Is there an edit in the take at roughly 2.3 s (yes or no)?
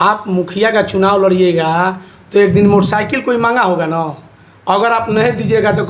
no